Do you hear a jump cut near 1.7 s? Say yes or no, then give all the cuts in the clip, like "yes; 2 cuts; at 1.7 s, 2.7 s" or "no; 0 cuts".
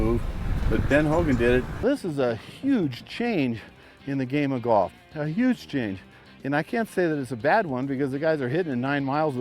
yes; 1 cut; at 1.7 s